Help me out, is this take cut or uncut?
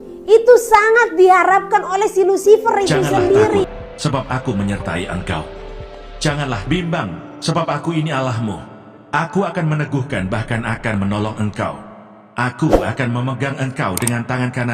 cut